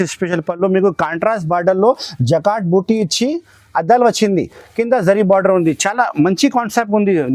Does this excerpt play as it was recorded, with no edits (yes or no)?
yes